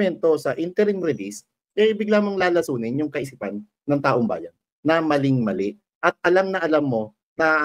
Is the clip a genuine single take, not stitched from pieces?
yes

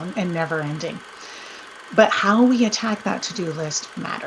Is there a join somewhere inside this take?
no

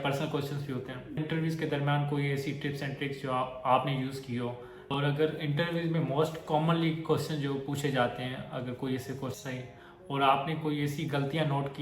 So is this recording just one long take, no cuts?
no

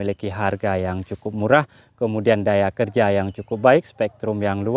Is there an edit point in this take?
no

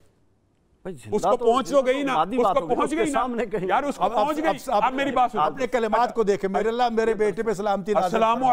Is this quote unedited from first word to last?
yes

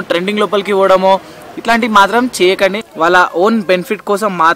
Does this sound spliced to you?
yes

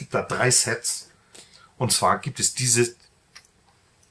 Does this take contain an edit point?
no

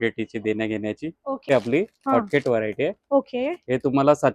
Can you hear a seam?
yes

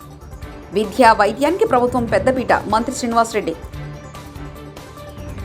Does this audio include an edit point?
no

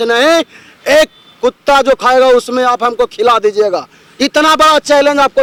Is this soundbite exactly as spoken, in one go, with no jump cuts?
yes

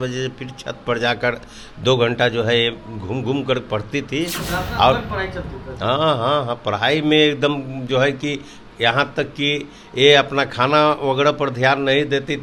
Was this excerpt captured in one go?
yes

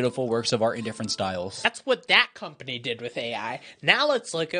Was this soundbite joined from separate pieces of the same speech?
yes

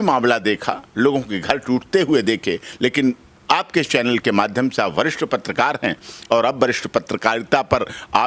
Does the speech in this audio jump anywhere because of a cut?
no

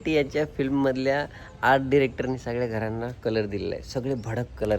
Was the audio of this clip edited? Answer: no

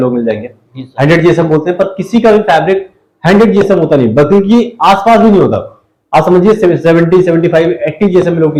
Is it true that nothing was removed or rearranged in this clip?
yes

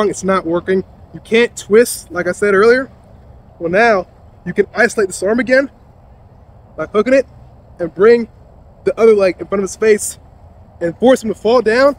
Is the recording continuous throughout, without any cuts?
yes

